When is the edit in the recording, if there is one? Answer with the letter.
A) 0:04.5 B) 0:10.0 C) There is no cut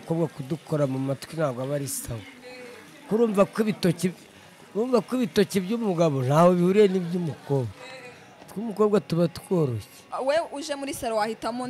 B